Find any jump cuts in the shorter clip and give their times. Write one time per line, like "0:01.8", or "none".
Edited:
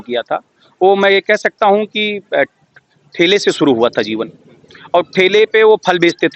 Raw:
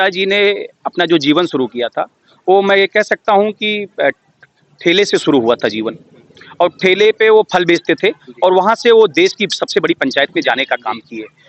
none